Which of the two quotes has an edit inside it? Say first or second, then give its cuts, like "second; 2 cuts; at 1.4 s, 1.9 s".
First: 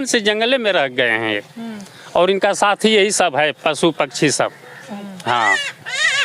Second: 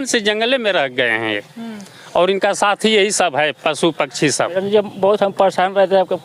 second; 1 cut; at 4.5 s